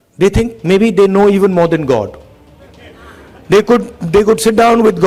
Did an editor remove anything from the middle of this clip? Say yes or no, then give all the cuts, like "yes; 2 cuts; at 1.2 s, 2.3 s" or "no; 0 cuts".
no; 0 cuts